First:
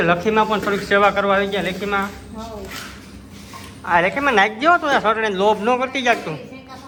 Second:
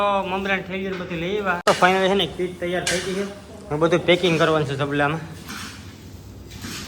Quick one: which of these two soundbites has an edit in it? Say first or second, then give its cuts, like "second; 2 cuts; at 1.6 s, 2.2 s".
second; 1 cut; at 1.6 s